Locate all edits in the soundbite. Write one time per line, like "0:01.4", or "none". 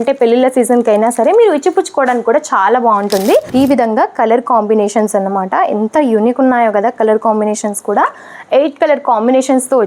0:03.5